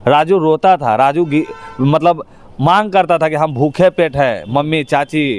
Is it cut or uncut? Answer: uncut